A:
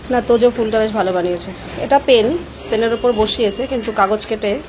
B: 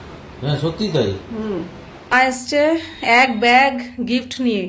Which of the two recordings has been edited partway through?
B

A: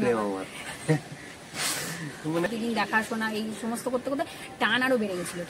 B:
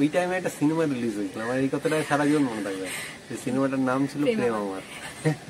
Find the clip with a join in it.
A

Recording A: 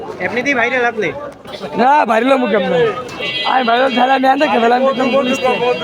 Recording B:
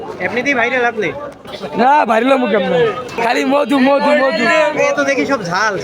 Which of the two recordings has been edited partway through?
B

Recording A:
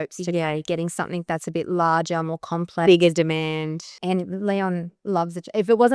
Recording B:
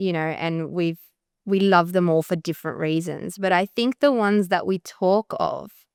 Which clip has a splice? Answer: A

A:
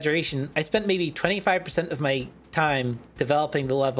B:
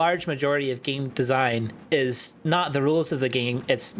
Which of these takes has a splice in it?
B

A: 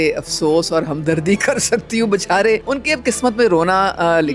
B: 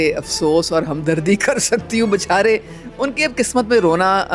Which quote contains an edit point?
A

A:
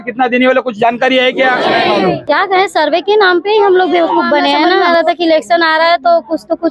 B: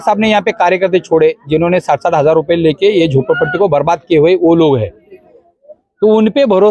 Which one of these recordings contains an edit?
A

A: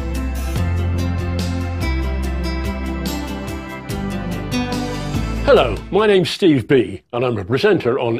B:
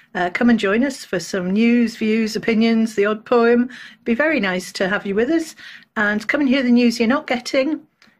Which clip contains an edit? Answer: A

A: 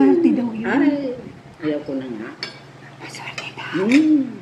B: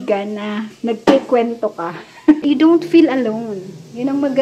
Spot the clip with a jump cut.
B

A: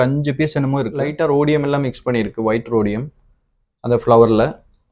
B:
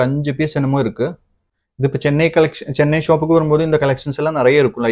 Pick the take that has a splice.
A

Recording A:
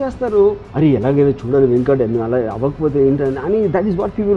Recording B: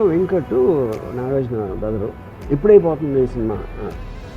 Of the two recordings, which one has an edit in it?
B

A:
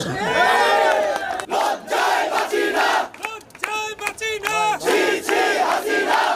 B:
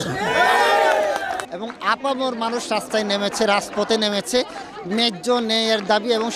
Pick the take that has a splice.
B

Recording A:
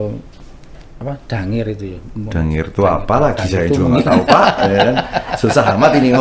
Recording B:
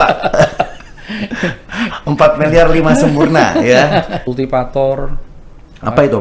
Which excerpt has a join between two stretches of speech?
B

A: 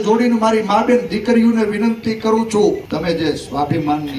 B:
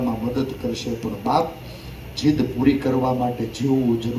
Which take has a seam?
A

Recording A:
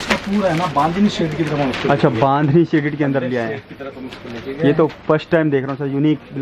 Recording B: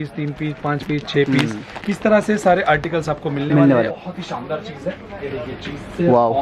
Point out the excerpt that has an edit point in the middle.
B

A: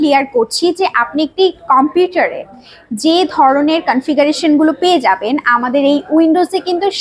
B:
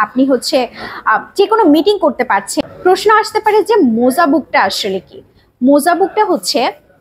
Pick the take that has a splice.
B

